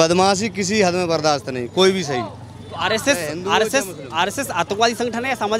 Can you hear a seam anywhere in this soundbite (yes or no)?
no